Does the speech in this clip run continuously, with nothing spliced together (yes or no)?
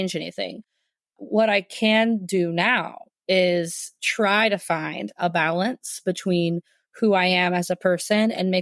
yes